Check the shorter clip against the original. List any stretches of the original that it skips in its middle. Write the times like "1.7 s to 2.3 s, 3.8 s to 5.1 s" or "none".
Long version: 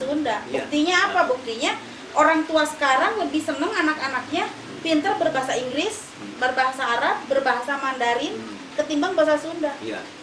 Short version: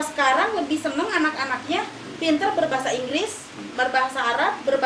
none